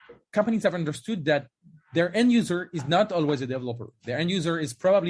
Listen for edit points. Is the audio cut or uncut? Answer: uncut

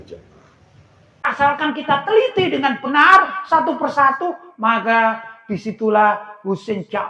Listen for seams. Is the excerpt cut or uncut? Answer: cut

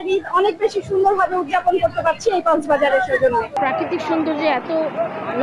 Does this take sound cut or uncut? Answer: cut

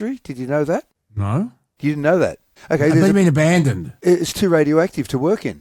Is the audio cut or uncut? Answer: uncut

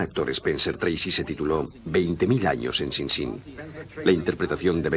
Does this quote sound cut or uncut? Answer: cut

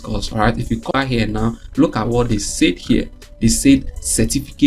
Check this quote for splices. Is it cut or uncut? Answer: cut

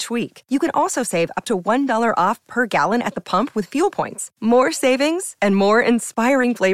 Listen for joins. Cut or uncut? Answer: uncut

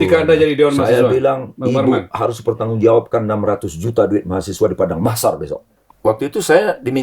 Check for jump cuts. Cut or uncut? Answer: cut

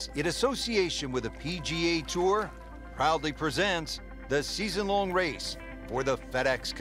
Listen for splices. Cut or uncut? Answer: uncut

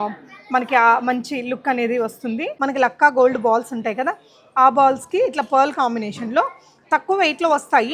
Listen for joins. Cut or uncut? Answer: cut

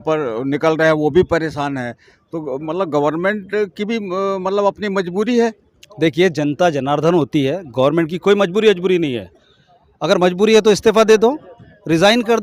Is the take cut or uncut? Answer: uncut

